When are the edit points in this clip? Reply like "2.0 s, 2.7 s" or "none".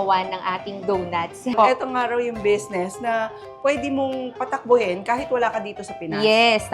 1.5 s